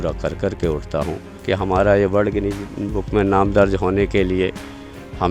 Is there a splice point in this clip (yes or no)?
yes